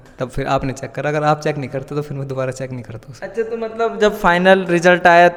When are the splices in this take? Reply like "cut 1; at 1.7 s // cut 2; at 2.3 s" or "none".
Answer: none